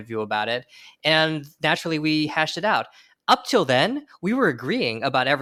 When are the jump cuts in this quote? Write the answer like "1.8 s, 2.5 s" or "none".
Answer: none